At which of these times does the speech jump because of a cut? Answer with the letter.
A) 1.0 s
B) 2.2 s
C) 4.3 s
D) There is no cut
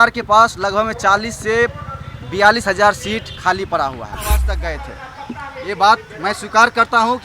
C